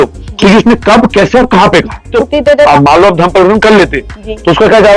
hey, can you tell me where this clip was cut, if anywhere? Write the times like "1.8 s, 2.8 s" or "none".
2.2 s